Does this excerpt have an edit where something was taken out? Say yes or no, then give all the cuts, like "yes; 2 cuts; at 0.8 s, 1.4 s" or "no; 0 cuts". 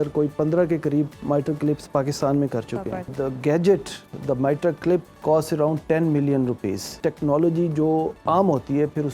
yes; 4 cuts; at 3.1 s, 5.1 s, 6.9 s, 8.2 s